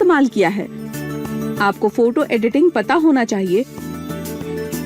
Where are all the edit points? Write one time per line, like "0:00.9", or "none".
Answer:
0:01.1